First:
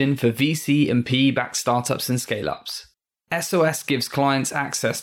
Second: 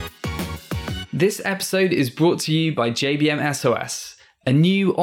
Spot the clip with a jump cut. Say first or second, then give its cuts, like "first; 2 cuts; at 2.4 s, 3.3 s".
second; 1 cut; at 1.0 s